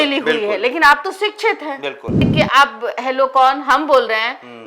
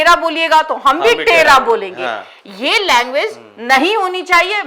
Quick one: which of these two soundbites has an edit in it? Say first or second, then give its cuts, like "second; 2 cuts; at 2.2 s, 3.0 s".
first; 1 cut; at 2.3 s